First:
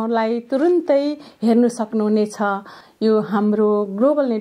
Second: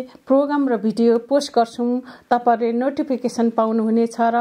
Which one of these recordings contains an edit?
first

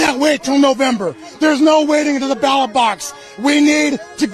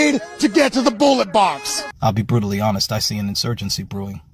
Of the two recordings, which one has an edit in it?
second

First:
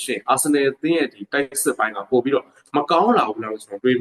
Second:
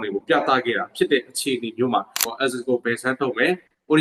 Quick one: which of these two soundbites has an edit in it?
second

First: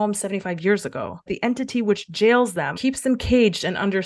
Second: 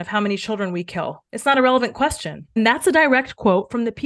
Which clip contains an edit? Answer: first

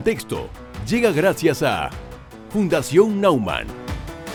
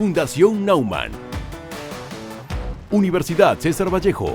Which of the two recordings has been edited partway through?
second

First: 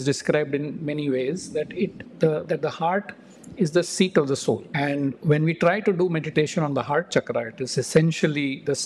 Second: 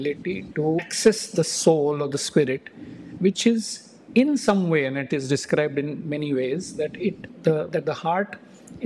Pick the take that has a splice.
first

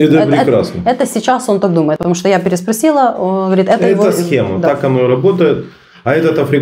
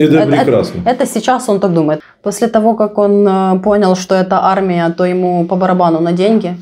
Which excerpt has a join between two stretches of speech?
second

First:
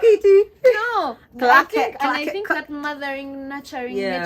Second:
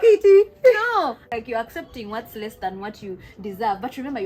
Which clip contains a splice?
second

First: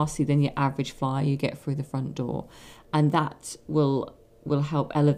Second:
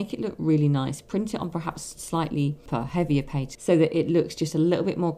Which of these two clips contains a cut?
second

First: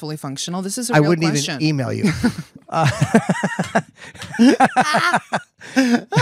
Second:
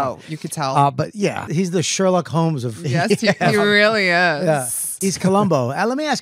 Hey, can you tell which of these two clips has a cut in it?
second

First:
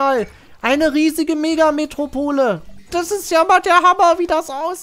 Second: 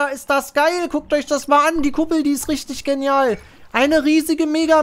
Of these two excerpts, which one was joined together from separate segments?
first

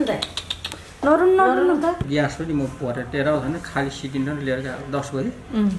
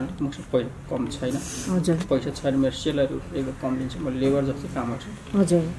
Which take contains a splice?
first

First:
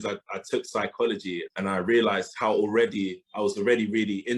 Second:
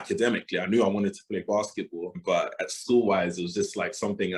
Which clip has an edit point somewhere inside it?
first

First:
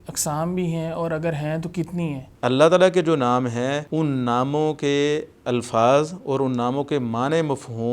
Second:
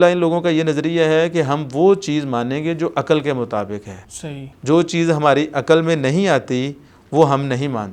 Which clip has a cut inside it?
first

